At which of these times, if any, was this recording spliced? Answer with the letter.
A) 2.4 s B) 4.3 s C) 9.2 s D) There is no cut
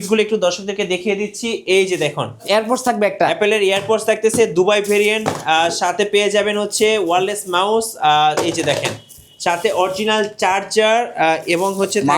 A